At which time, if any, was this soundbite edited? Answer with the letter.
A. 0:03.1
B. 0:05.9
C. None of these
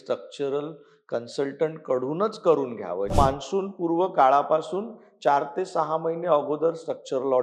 A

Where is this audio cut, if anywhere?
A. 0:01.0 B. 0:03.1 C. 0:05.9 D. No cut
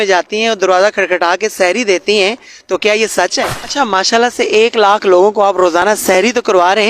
B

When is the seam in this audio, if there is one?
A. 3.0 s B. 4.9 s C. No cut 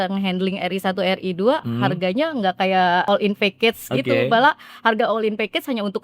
A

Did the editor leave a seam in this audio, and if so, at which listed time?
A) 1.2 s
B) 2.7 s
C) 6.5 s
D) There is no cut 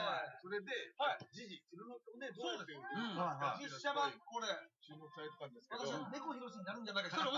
B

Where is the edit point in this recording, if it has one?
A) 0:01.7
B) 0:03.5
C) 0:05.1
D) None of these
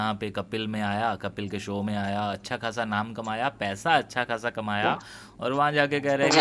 D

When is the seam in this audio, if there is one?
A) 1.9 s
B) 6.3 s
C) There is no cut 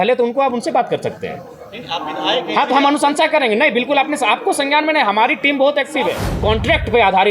B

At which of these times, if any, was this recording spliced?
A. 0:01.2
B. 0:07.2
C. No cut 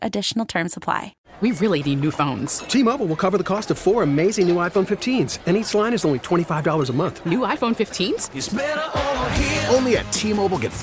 A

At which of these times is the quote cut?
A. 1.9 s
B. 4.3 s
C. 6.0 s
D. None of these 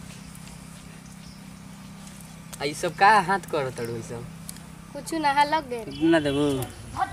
C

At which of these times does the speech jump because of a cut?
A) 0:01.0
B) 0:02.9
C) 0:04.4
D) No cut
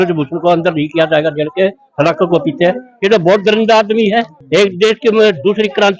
C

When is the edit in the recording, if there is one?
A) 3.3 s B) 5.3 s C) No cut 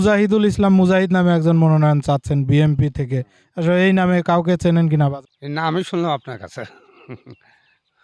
B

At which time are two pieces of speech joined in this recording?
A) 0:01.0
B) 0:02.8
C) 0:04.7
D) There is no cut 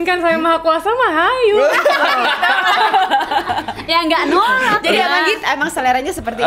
D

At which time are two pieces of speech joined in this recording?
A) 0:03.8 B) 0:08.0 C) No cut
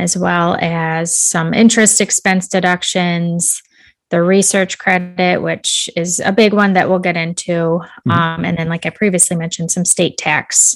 C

